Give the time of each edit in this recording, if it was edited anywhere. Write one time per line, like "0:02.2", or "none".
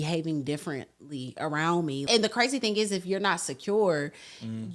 0:02.1